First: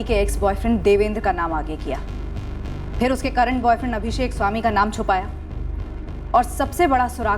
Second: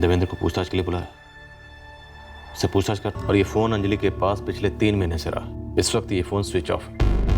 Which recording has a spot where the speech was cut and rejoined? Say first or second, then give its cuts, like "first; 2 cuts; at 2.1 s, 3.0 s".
second; 1 cut; at 3.2 s